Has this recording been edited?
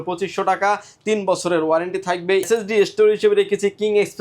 yes; 1 cut; at 2.5 s

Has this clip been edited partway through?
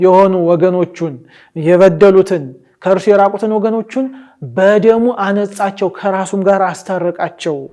no; 0 cuts

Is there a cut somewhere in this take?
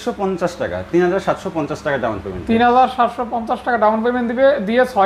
no; 0 cuts

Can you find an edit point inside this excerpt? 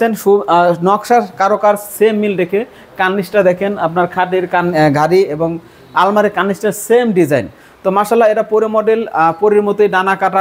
no; 0 cuts

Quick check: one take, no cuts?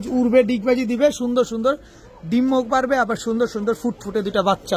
yes; 0 cuts

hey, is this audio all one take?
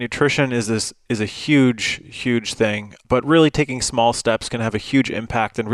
no; 1 cut; at 2.9 s

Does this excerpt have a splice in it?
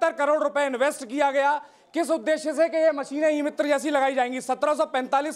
no; 0 cuts

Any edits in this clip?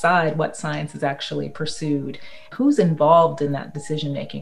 yes; 1 cut; at 2.5 s

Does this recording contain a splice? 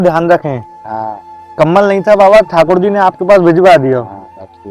no; 0 cuts

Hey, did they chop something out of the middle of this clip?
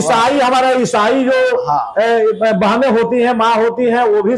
no; 0 cuts

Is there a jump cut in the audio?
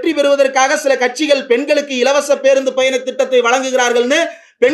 no; 0 cuts

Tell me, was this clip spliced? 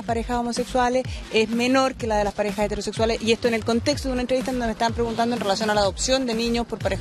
yes; 1 cut; at 6.0 s

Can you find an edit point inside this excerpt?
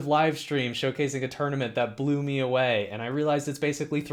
no; 0 cuts

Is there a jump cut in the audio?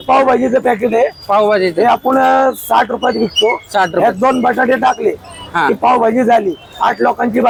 no; 0 cuts

